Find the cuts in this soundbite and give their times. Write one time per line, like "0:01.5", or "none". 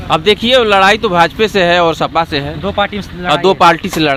none